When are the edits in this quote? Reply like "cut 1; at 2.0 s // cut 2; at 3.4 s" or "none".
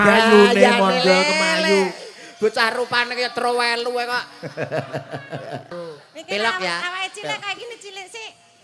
cut 1; at 5.7 s